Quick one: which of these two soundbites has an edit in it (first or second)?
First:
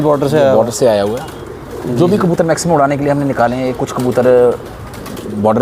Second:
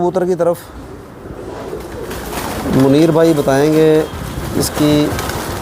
second